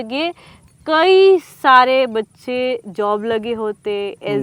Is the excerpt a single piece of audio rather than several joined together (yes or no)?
yes